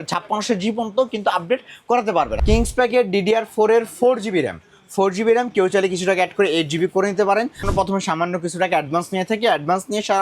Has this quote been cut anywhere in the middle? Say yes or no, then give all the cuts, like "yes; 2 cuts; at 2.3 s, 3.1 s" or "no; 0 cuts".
yes; 2 cuts; at 2.3 s, 7.6 s